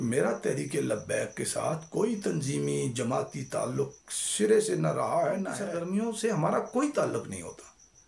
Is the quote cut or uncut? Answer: cut